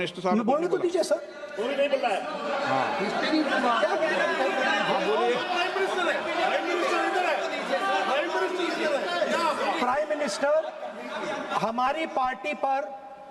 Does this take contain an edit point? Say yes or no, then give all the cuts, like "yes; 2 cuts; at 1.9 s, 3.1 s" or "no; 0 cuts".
no; 0 cuts